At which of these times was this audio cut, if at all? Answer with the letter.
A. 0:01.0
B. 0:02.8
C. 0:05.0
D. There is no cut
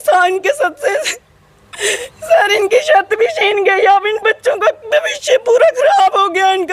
D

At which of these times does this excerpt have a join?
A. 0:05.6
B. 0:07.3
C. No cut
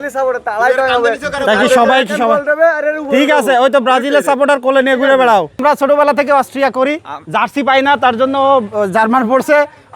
A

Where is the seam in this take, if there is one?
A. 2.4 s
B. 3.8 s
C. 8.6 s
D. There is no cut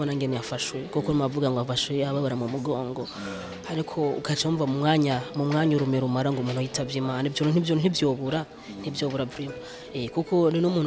D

